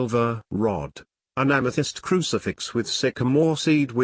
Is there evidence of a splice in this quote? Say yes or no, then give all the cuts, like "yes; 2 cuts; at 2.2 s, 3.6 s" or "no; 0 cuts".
yes; 1 cut; at 2.7 s